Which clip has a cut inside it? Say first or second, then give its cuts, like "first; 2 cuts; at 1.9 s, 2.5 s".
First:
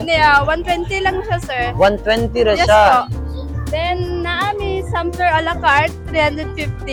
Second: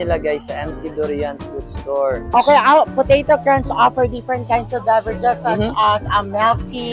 second; 1 cut; at 2.3 s